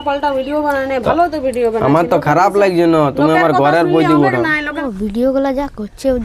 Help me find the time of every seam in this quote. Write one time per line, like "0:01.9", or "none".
0:04.8